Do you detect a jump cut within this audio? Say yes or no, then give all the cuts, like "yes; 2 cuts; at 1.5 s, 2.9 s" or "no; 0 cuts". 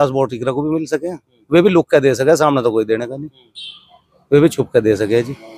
no; 0 cuts